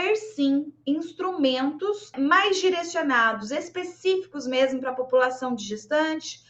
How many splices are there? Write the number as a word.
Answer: one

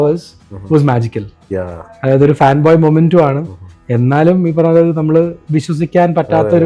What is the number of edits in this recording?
zero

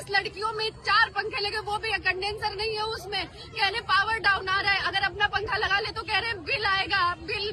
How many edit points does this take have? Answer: zero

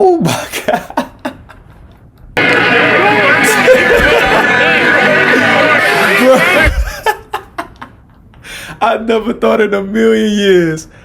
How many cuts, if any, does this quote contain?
one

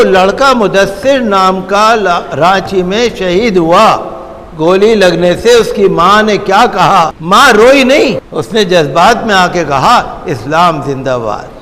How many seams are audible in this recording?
two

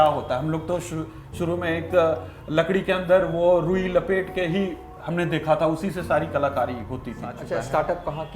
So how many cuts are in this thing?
one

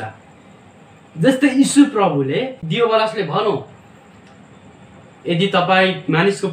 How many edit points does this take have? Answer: one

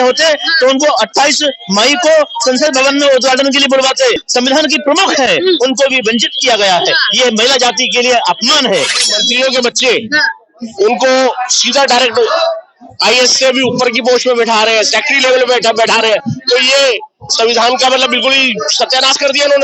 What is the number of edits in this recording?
two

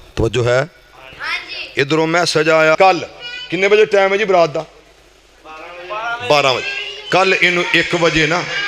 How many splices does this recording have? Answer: one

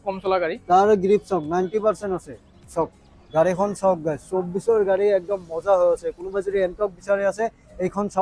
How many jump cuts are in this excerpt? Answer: zero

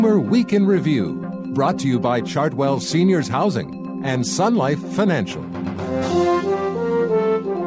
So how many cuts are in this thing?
one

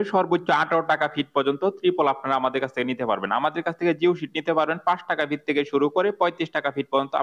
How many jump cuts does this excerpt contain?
zero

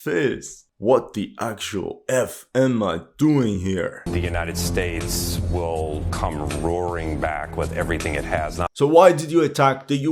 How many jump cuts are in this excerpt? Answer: two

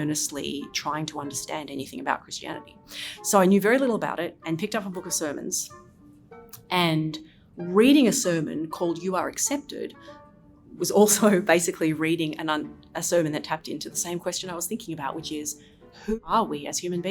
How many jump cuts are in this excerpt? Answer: one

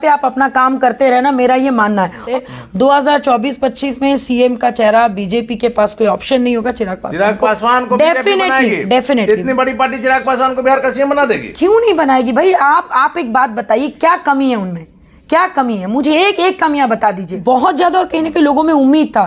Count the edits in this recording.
two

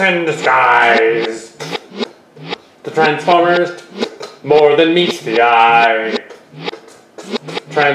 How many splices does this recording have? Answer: zero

